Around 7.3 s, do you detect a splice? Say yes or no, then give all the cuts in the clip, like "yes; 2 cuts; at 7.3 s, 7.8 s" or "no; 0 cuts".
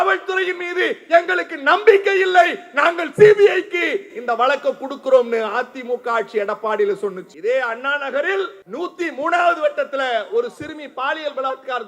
yes; 2 cuts; at 7.3 s, 8.6 s